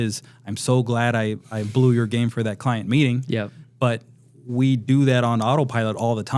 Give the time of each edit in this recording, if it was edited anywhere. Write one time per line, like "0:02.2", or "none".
none